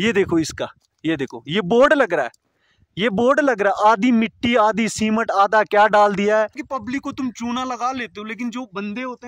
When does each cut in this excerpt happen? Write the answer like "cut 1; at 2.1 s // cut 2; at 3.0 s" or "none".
cut 1; at 6.6 s